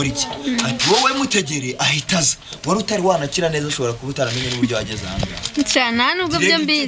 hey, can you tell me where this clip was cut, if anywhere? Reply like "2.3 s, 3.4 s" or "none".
none

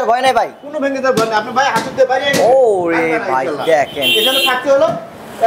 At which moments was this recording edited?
none

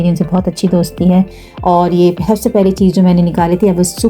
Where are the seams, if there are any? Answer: 1.4 s

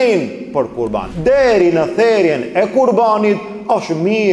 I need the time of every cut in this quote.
1.1 s

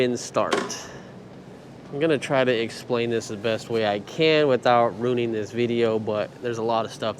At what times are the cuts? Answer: none

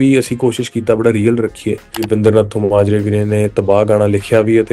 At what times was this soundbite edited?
2.0 s

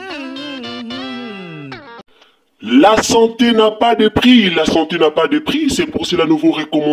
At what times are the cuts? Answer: 1.9 s

